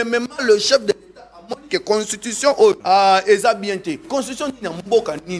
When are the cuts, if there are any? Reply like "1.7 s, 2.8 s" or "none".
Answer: 2.8 s, 4.1 s

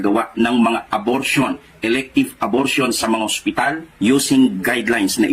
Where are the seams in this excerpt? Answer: 1.8 s

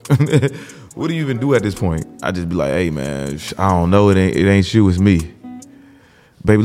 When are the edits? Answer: 2.1 s

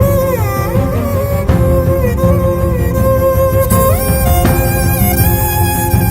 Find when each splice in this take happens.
none

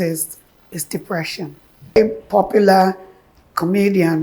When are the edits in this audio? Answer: 2.0 s

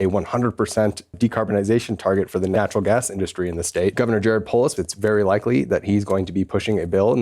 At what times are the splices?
1.1 s, 2.5 s, 3.9 s, 4.7 s

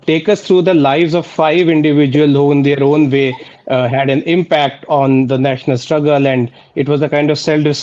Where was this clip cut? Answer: none

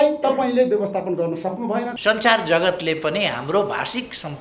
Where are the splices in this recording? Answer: 1.9 s

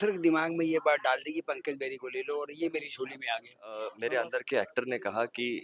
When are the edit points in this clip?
3.9 s

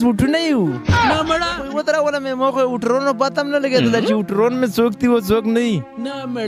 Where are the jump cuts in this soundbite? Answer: 1.6 s

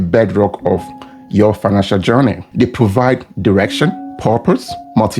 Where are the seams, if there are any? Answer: none

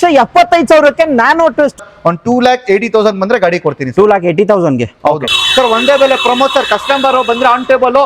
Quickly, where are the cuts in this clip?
1.8 s, 5.4 s

